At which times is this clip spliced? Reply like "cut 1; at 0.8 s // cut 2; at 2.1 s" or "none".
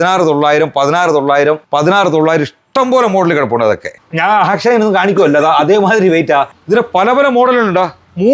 cut 1; at 1.6 s // cut 2; at 3.9 s // cut 3; at 6.6 s